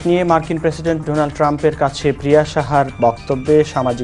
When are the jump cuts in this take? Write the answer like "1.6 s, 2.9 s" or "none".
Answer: none